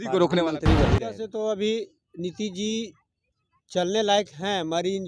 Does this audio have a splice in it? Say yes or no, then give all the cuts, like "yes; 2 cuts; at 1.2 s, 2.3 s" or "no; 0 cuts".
yes; 1 cut; at 1.1 s